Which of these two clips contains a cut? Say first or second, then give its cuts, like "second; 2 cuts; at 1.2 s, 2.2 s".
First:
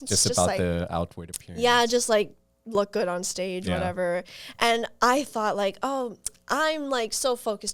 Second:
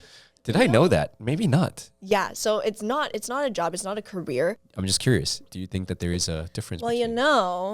second; 1 cut; at 4.6 s